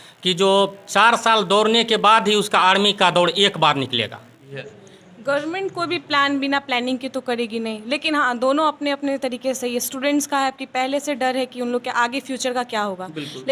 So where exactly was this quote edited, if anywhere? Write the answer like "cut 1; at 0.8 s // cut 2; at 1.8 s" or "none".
cut 1; at 4.5 s